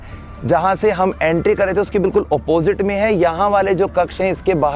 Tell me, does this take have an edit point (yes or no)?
no